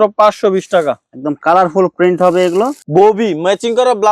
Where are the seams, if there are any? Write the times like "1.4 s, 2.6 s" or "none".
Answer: 2.8 s